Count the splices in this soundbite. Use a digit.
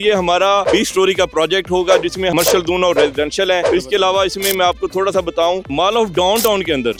0